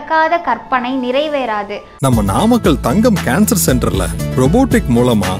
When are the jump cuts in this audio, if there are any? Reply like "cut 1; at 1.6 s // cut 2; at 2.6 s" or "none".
cut 1; at 1.8 s